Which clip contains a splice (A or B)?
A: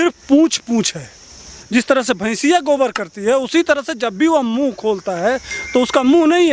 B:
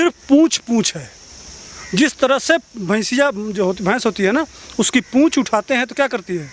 A